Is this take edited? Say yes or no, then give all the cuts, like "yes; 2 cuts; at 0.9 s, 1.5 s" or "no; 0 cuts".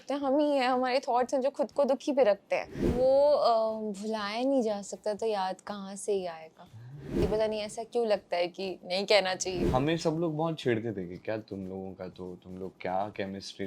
yes; 3 cuts; at 2.9 s, 7.2 s, 9.6 s